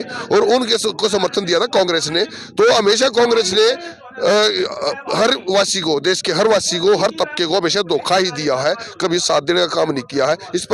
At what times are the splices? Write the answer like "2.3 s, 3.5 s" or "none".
none